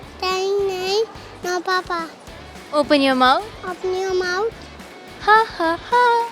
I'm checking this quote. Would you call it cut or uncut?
uncut